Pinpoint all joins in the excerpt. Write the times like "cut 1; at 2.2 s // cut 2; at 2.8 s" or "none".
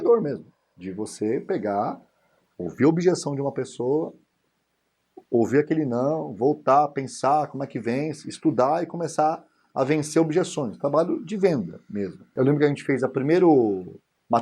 cut 1; at 12.3 s